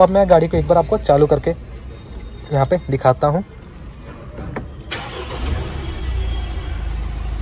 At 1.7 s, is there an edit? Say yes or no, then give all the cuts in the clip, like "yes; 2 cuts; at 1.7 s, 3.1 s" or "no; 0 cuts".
no; 0 cuts